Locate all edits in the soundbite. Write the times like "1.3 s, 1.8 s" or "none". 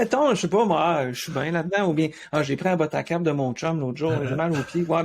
none